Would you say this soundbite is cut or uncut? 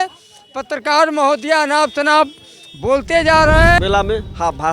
cut